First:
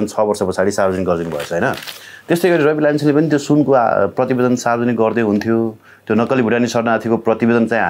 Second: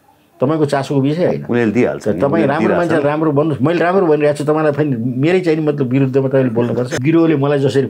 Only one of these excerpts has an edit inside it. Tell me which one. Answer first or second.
second